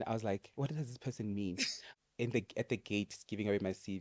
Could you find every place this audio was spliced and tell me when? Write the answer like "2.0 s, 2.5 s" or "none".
1.8 s